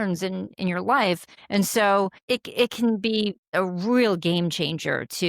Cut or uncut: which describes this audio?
cut